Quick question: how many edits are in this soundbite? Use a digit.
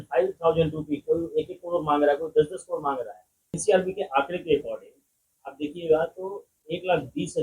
1